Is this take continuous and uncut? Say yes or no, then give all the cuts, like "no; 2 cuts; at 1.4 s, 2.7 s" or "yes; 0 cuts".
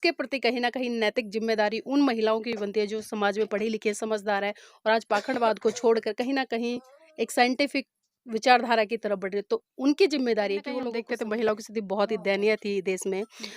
no; 1 cut; at 10.9 s